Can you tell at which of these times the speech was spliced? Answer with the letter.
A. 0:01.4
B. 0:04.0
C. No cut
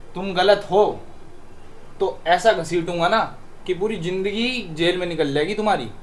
C